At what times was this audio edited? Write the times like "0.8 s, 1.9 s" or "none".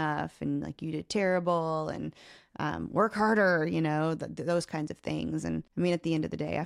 5.7 s